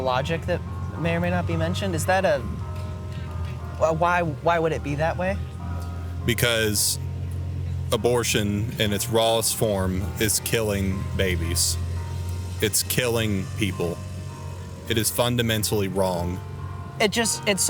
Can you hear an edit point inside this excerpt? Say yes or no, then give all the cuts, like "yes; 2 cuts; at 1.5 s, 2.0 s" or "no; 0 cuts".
no; 0 cuts